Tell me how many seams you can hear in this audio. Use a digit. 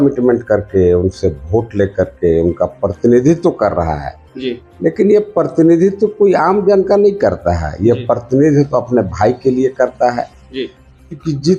0